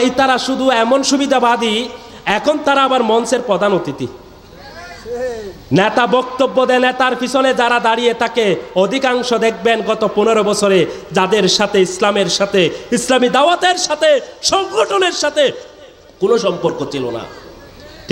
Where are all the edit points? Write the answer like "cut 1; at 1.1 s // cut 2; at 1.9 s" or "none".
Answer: none

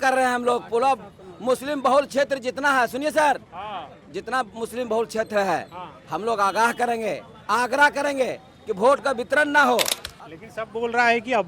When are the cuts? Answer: cut 1; at 10.0 s

